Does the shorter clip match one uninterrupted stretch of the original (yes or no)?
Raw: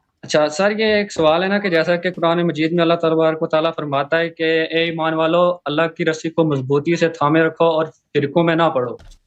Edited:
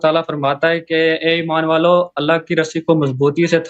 yes